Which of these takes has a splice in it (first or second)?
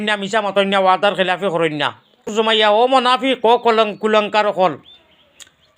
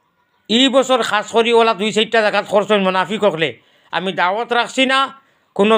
first